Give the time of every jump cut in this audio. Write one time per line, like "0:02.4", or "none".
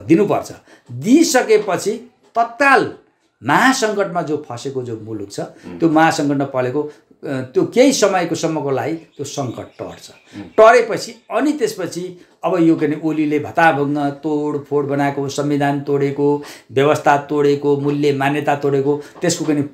none